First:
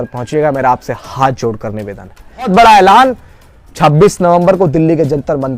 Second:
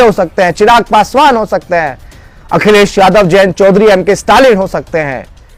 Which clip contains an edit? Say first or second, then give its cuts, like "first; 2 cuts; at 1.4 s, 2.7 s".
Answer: first; 1 cut; at 2.5 s